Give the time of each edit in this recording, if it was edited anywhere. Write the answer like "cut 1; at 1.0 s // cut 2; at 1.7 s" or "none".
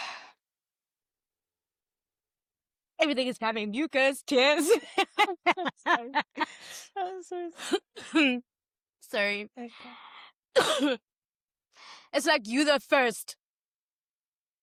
none